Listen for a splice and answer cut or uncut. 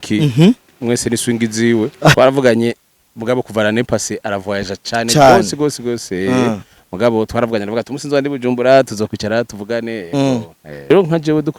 cut